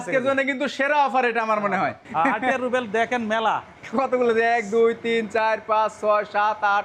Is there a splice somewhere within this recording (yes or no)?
yes